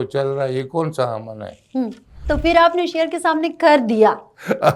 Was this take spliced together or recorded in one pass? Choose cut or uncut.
cut